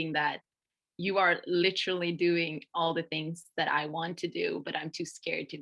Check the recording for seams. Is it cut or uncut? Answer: uncut